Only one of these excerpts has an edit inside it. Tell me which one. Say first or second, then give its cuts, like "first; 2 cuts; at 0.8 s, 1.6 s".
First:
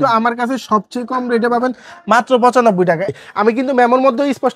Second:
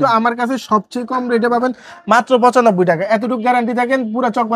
first; 1 cut; at 3.0 s